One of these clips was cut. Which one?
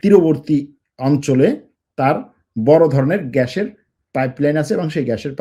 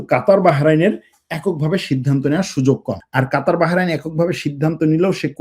second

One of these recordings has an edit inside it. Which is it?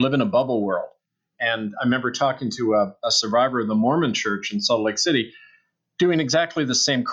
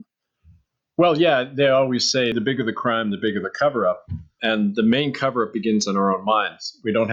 first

